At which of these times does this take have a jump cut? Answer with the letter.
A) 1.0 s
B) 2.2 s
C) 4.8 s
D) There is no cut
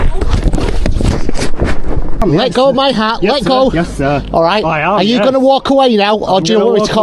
B